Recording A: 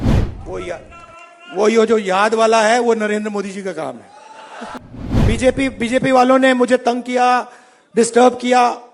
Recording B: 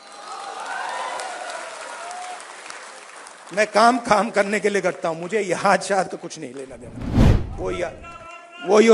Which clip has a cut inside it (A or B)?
A